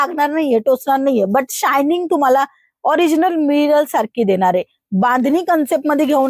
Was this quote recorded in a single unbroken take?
yes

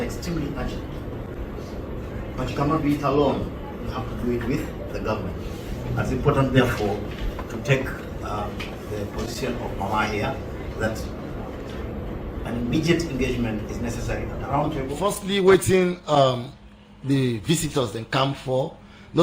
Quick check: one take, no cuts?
no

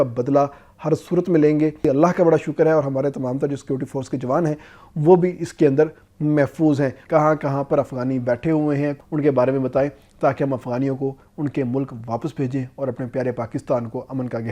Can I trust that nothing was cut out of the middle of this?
no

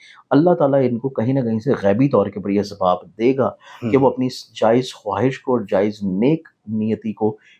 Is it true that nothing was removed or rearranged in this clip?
yes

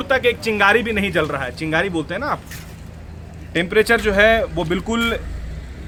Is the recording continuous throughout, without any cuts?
yes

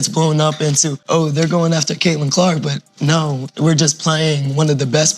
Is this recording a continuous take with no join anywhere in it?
no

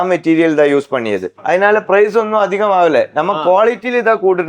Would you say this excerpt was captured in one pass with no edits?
no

